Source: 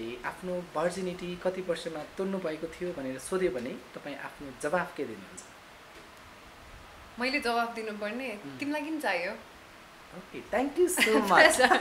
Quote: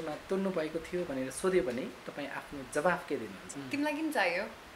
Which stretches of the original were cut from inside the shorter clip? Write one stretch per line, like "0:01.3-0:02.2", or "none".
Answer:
0:05.5-0:08.5